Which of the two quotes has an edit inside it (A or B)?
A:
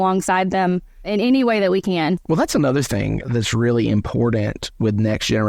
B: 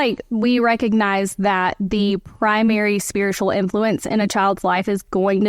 A